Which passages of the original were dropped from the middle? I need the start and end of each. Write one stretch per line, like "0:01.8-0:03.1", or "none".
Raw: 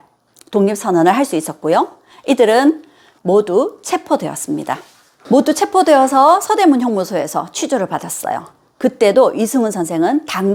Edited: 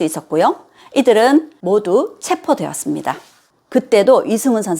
0:02.9-0:03.2
0:05.1-0:08.5